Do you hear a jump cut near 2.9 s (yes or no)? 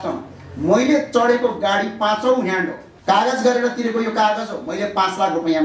yes